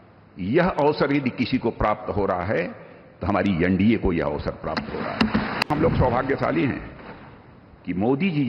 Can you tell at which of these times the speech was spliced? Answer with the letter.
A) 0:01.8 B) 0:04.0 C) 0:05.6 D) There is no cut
C